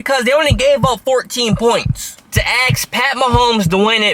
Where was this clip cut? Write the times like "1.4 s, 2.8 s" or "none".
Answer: 2.3 s